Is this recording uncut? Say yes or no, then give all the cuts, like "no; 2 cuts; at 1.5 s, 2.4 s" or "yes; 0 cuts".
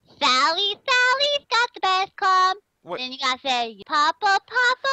no; 1 cut; at 3.8 s